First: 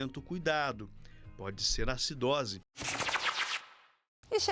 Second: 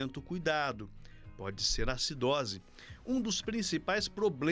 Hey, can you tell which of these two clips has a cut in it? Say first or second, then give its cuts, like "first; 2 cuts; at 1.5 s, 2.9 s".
second; 1 cut; at 2.6 s